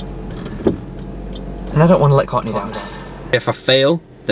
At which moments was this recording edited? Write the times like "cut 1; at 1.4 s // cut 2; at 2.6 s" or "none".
cut 1; at 3.3 s